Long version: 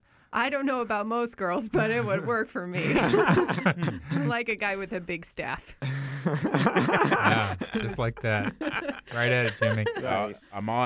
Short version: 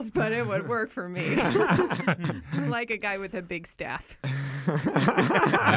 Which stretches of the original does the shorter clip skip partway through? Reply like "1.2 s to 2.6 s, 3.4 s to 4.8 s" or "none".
none